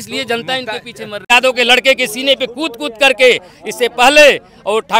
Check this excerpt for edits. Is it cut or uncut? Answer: cut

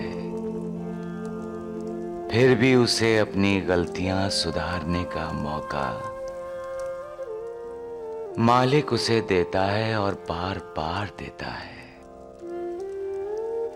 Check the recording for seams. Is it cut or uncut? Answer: uncut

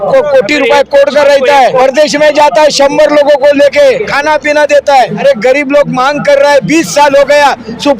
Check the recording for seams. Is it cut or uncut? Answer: cut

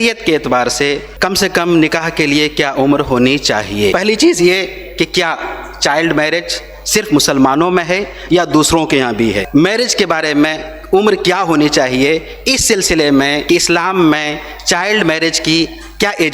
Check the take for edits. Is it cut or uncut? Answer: cut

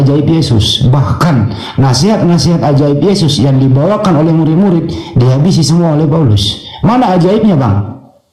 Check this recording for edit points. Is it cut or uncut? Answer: uncut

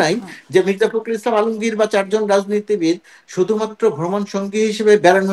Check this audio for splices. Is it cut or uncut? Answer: uncut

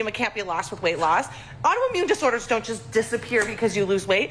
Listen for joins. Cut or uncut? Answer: uncut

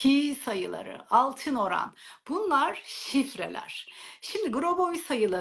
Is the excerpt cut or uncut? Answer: uncut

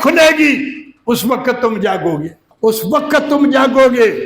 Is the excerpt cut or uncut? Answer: cut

